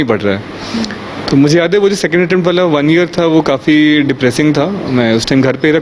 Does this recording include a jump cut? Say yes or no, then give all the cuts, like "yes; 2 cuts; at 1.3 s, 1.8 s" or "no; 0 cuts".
no; 0 cuts